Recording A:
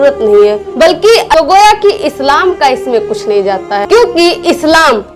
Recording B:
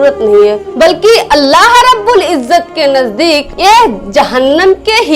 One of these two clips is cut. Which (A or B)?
A